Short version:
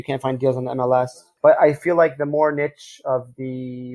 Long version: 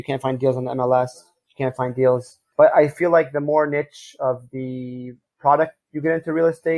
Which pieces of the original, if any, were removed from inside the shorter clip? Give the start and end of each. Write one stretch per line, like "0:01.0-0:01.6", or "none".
0:01.2-0:02.4